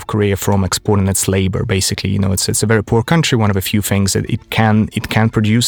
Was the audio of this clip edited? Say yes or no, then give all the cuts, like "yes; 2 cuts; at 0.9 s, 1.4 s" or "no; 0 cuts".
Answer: no; 0 cuts